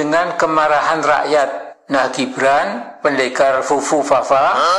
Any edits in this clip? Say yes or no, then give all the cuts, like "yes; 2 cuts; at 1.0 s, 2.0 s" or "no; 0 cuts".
no; 0 cuts